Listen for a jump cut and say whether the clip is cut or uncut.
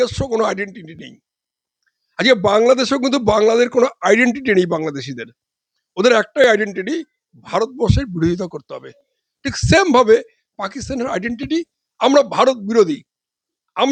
uncut